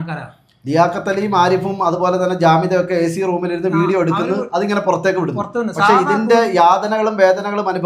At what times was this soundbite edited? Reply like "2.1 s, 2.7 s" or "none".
none